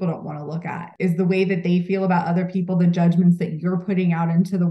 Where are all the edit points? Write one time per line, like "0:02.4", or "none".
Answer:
0:00.9